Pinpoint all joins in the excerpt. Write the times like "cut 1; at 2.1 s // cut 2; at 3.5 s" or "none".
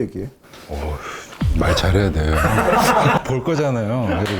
cut 1; at 3.2 s